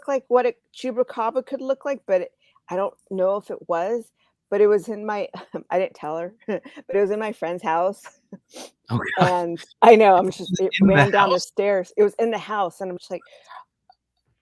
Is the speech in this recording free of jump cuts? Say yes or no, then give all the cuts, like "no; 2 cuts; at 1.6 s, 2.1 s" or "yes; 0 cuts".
yes; 0 cuts